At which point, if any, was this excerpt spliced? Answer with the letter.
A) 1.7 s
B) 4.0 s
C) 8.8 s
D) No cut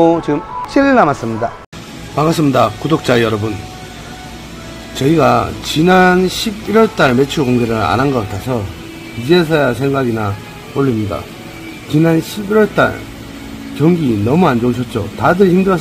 A